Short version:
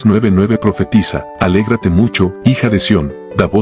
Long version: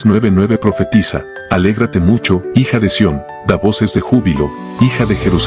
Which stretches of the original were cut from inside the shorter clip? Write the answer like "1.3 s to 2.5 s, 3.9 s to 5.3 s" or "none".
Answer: 1.2 s to 1.3 s